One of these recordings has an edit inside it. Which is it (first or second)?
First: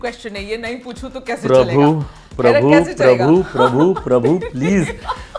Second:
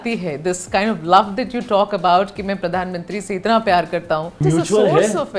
second